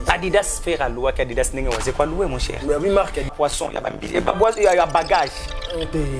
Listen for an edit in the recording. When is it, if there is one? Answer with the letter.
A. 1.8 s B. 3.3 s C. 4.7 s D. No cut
B